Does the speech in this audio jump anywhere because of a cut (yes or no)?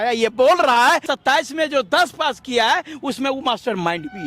yes